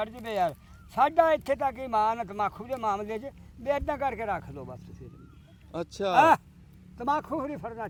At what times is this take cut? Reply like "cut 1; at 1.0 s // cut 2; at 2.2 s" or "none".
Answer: none